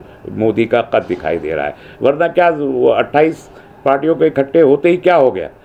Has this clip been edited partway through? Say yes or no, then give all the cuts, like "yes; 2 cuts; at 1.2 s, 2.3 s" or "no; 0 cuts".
no; 0 cuts